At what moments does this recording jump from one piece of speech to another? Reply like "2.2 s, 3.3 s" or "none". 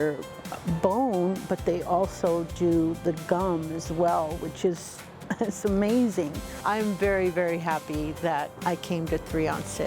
6.6 s, 8.5 s